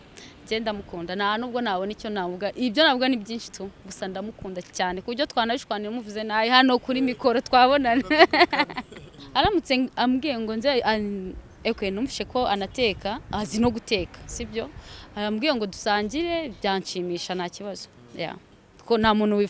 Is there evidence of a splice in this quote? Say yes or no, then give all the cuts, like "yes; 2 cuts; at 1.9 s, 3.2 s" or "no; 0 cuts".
yes; 1 cut; at 9.2 s